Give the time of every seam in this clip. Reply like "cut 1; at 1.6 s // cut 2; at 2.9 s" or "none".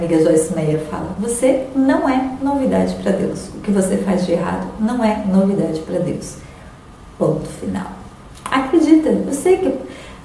none